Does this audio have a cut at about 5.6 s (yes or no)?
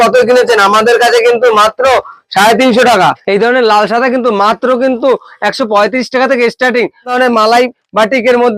no